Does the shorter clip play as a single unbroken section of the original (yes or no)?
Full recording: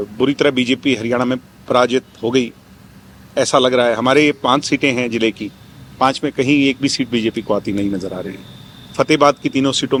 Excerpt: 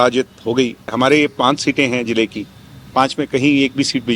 no